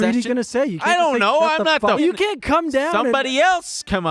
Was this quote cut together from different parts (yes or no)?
yes